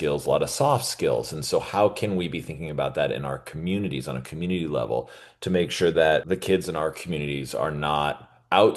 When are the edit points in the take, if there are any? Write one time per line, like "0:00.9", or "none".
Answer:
0:06.2